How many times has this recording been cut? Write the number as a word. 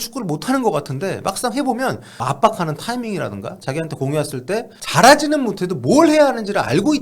two